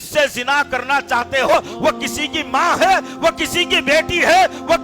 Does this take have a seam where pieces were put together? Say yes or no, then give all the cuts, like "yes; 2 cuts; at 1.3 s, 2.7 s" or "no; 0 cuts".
yes; 1 cut; at 1.5 s